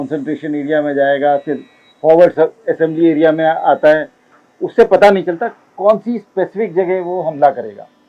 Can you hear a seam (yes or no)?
no